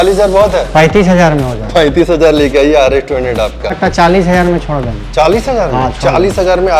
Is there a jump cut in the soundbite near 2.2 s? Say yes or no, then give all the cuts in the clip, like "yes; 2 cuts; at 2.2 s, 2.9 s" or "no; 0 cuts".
no; 1 cut; at 3.8 s